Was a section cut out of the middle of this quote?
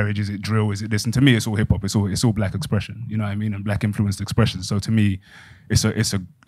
no; 0 cuts

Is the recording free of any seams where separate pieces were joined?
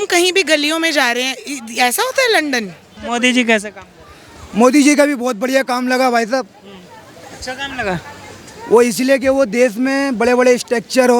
no; 1 cut; at 3.0 s

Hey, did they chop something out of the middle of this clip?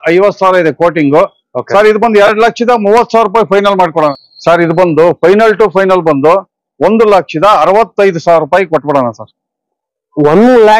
yes; 1 cut; at 4.3 s

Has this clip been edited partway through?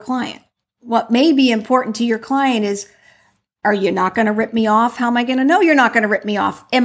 no; 0 cuts

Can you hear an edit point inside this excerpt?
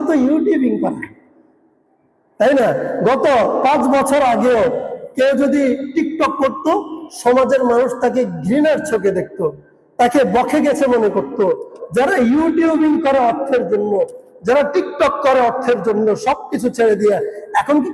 yes; 1 cut; at 11.7 s

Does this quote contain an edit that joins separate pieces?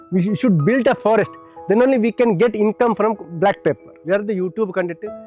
no; 0 cuts

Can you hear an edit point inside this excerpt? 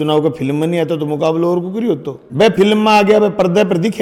no; 0 cuts

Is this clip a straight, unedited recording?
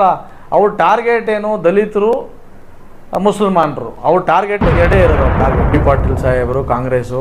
no; 1 cut; at 5.7 s

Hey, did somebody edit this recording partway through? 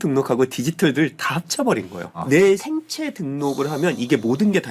yes; 1 cut; at 2.6 s

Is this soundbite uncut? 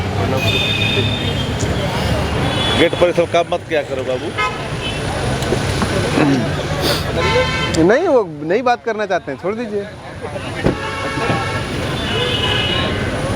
yes; 0 cuts

